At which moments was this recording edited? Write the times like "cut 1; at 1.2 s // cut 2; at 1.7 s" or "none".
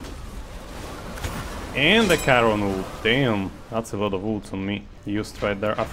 cut 1; at 4.9 s